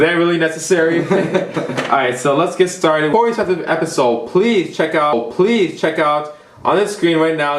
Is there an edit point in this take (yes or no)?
yes